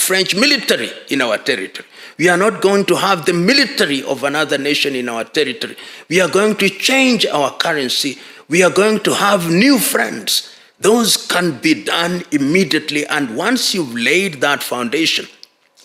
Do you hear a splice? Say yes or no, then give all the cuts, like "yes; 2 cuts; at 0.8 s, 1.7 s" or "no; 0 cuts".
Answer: no; 0 cuts